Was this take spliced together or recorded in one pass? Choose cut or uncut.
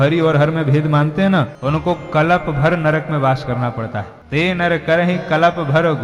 cut